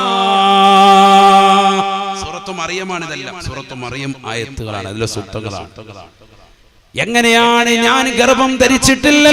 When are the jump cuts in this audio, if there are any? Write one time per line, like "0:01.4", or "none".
none

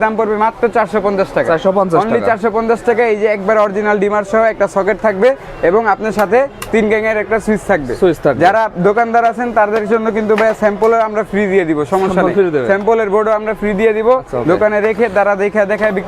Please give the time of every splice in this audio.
none

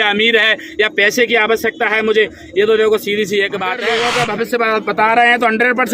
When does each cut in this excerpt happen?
0:03.9

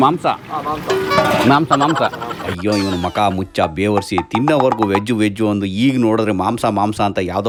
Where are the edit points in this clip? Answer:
none

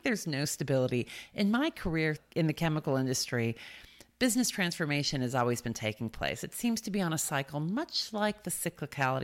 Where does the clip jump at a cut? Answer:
0:02.2

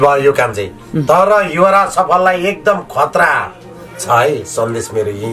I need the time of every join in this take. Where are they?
none

